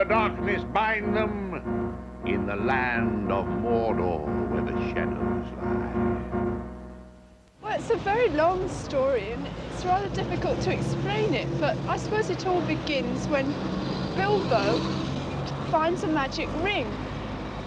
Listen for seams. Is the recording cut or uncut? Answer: uncut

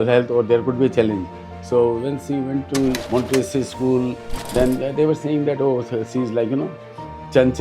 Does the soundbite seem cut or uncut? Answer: cut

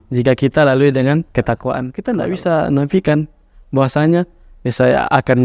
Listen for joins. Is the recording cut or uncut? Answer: cut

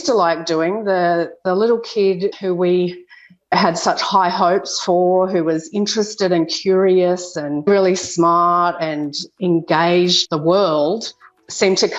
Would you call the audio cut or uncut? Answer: cut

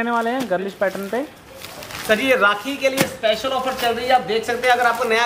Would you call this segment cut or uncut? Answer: uncut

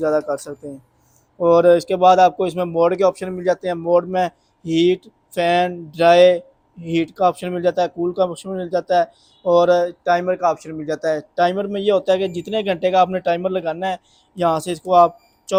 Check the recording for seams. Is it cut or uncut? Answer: uncut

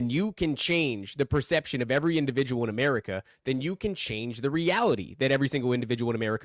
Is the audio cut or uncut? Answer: uncut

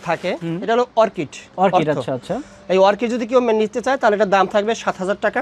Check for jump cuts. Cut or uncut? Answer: uncut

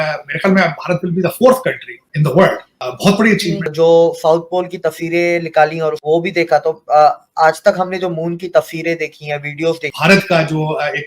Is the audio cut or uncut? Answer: cut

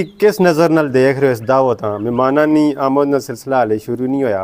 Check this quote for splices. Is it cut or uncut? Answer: uncut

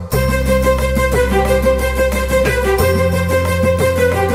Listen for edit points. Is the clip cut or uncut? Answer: uncut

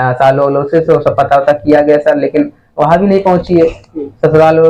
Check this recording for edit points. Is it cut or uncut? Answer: uncut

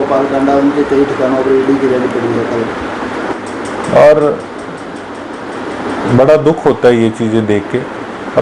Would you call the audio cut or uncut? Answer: cut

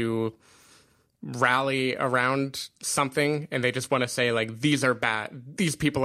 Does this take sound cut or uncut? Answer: uncut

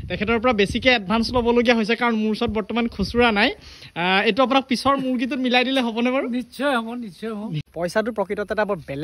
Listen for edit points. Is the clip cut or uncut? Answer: cut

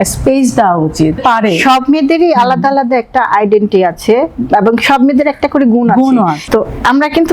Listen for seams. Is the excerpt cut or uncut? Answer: cut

